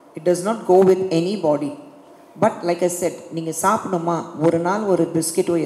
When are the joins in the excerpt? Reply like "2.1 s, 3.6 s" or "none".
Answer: none